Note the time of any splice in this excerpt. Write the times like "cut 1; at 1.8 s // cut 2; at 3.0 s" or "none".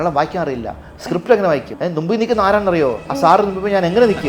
cut 1; at 1.7 s // cut 2; at 3.1 s